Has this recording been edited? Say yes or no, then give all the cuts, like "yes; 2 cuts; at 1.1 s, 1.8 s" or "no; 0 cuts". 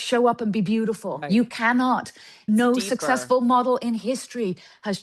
yes; 2 cuts; at 1.2 s, 2.4 s